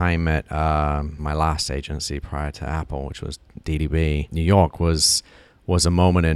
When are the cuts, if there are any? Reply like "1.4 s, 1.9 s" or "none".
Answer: 1.2 s, 4.3 s